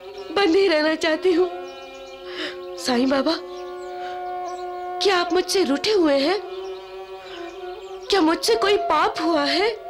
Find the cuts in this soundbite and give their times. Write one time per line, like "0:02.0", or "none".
none